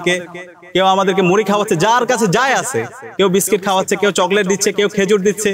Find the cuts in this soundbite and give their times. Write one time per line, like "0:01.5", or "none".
none